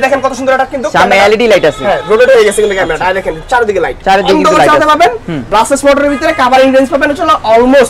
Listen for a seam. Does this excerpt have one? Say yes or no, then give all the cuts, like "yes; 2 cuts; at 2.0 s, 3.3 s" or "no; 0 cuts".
no; 0 cuts